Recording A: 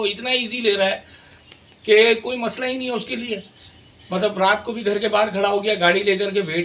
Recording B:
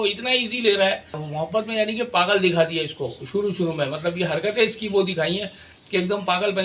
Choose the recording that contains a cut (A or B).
B